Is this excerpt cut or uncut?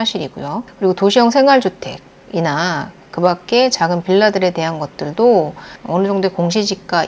cut